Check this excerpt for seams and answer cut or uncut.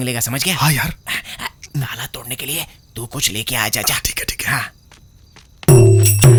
uncut